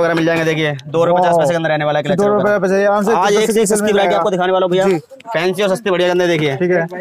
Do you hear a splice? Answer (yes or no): no